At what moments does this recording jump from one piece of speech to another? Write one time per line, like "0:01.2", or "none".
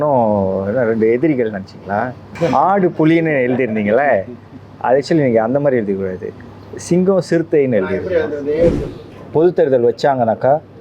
0:02.3
0:08.9